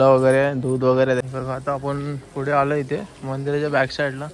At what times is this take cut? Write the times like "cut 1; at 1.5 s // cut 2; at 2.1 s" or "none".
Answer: cut 1; at 1.2 s